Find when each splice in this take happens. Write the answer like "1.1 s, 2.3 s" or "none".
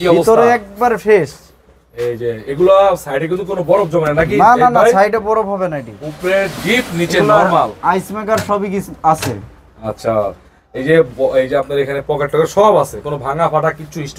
none